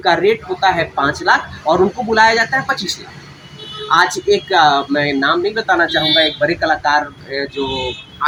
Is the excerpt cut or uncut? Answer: uncut